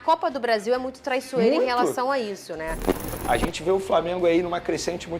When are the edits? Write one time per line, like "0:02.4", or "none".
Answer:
0:03.0